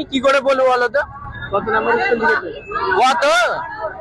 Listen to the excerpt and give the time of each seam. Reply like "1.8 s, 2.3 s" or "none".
none